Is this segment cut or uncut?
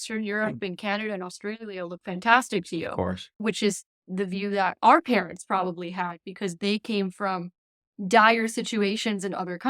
cut